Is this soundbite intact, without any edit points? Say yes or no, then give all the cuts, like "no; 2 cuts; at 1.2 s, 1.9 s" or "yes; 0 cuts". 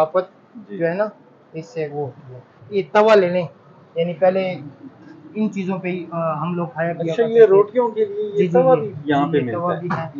no; 1 cut; at 2.6 s